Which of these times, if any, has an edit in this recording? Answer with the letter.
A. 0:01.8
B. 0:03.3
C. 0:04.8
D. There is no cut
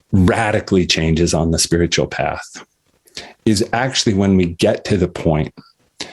D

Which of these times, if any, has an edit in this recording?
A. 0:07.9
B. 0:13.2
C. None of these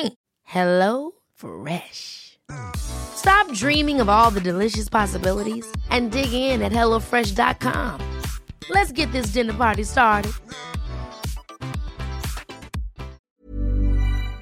B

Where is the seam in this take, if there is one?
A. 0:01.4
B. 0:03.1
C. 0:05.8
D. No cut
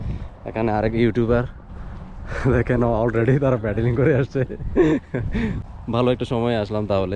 C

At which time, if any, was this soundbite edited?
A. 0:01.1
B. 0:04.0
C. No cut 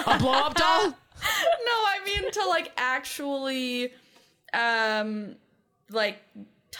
C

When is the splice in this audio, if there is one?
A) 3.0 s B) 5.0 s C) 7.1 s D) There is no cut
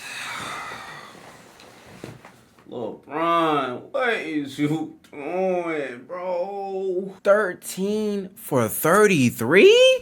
C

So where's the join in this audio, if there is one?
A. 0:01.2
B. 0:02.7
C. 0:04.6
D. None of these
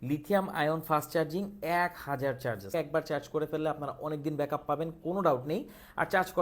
B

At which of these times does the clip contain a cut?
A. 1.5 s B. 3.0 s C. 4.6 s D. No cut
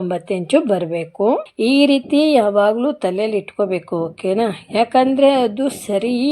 A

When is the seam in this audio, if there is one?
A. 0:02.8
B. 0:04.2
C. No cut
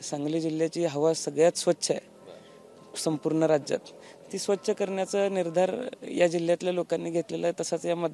C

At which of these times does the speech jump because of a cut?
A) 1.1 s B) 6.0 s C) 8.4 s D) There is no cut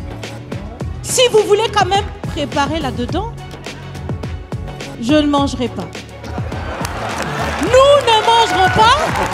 A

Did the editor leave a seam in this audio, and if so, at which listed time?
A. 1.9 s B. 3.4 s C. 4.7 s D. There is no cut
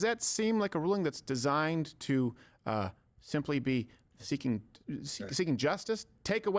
D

